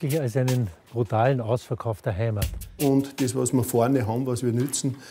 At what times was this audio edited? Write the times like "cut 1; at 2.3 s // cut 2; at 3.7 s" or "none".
cut 1; at 2.8 s